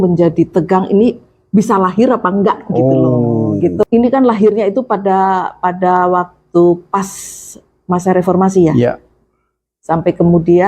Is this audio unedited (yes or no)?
no